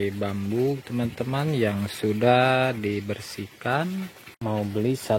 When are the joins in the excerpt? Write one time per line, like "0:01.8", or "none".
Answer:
0:04.3